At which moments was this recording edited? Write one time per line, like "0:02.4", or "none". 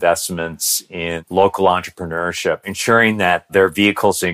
0:01.2
0:02.7